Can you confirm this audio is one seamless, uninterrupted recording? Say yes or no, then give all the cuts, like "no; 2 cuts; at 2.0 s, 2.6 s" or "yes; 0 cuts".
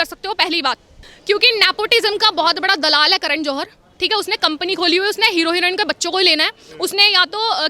no; 1 cut; at 0.9 s